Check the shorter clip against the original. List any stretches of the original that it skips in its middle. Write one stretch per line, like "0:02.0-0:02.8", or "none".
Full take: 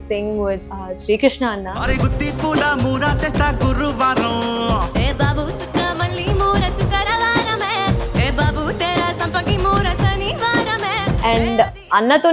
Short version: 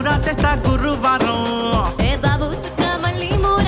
none